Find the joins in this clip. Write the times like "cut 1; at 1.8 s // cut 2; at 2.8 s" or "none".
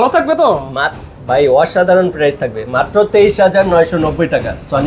none